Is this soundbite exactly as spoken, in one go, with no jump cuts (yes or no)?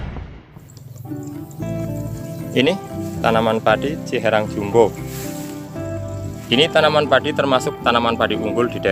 yes